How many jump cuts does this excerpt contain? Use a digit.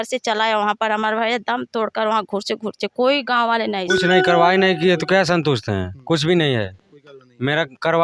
1